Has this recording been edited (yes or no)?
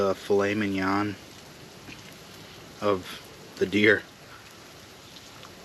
no